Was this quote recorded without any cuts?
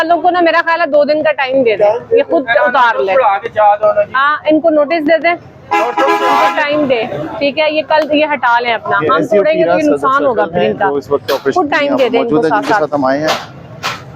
yes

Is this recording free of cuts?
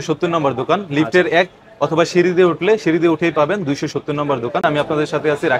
no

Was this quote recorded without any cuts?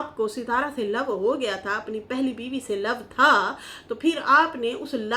yes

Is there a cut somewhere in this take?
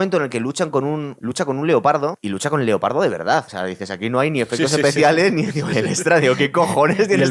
yes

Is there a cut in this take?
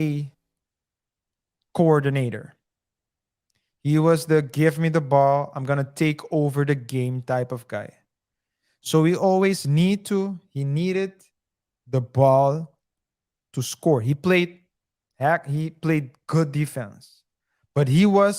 yes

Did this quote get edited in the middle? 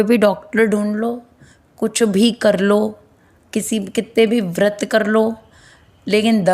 no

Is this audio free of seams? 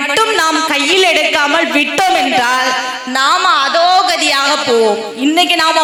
yes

